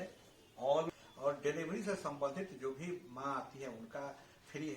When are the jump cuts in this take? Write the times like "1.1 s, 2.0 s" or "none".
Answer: 0.9 s